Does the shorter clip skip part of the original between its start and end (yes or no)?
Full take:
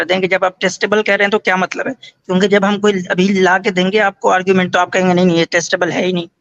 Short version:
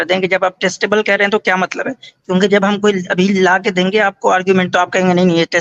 no